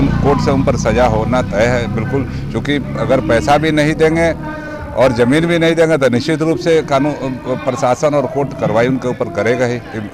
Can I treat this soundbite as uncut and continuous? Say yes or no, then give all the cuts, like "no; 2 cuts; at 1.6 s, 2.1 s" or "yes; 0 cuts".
yes; 0 cuts